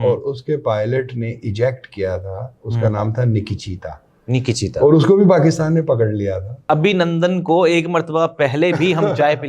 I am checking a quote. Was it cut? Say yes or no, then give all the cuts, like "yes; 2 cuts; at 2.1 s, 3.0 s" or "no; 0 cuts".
yes; 1 cut; at 6.7 s